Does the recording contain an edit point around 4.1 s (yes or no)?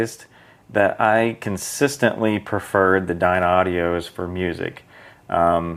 no